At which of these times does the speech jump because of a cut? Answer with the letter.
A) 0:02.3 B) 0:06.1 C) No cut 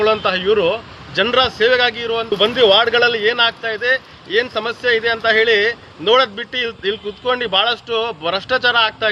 A